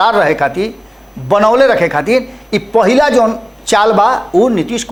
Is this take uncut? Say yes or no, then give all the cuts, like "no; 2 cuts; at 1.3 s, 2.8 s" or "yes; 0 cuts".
yes; 0 cuts